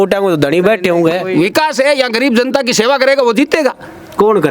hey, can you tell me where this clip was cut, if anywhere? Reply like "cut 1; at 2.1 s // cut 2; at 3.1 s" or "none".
cut 1; at 1.2 s